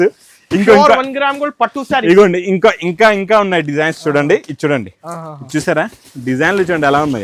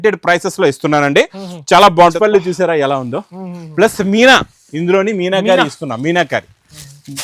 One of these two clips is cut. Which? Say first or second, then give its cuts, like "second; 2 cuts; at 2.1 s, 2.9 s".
second; 1 cut; at 2.1 s